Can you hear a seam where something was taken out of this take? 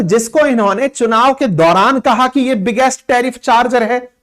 no; 0 cuts

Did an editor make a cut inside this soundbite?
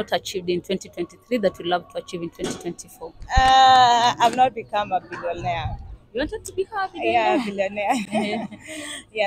no; 0 cuts

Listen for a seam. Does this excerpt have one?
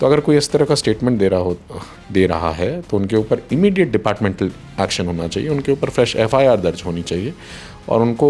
no; 0 cuts

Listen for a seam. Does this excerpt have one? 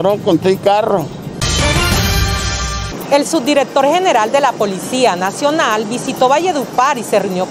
yes; 2 cuts; at 1.4 s, 2.8 s

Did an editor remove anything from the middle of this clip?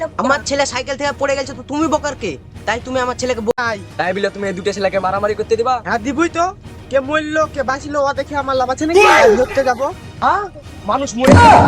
yes; 1 cut; at 3.5 s

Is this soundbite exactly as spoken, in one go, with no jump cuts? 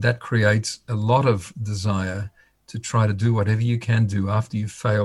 yes; 0 cuts

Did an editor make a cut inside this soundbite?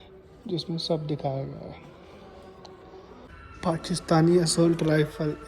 yes; 1 cut; at 3.3 s

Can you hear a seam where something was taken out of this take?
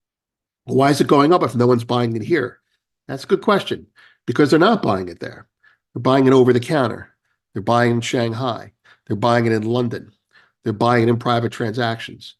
no; 0 cuts

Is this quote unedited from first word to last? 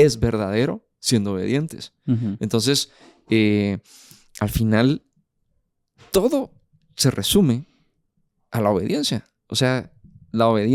yes; 0 cuts

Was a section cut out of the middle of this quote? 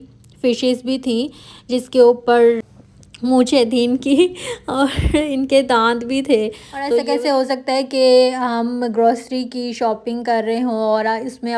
yes; 2 cuts; at 2.6 s, 7.0 s

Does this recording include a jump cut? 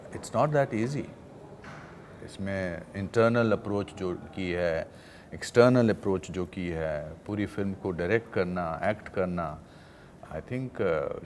no; 0 cuts

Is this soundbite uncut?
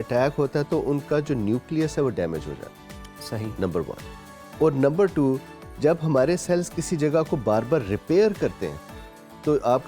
yes; 0 cuts

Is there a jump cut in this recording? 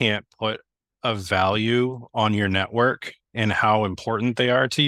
no; 0 cuts

